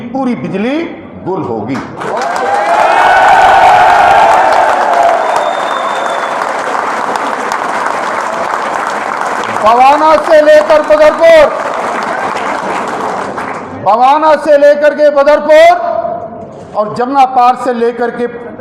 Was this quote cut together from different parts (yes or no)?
no